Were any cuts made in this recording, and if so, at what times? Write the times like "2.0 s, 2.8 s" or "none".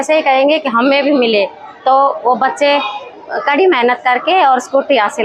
none

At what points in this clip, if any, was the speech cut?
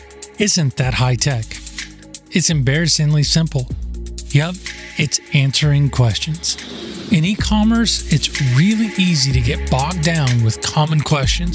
none

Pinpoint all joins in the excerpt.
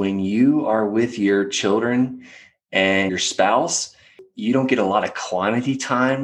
3.1 s, 4.2 s

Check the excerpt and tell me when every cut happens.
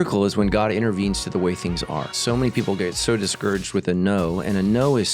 2.1 s

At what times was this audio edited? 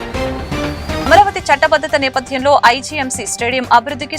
0.9 s

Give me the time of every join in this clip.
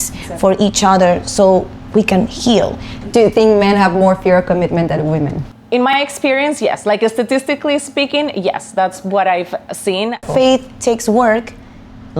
2.9 s, 5.9 s, 10.2 s

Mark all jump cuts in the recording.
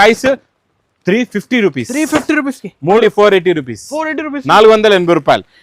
3.0 s

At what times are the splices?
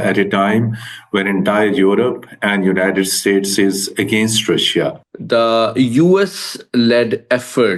5.0 s

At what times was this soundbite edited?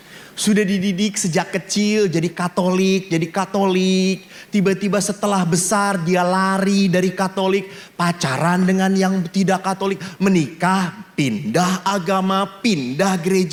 none

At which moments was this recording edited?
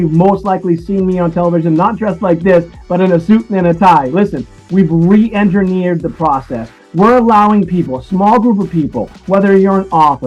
none

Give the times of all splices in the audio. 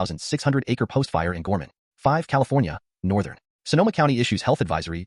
1.8 s

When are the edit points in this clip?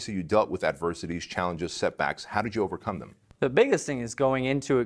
none

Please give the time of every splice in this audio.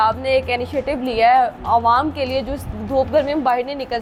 none

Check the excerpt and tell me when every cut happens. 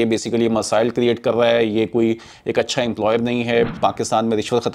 3.7 s

